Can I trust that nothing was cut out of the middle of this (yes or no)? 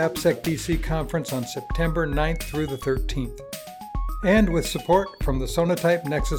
yes